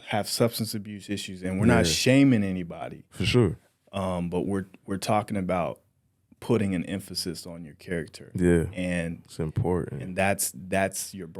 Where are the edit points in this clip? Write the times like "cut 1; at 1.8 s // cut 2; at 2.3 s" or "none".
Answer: none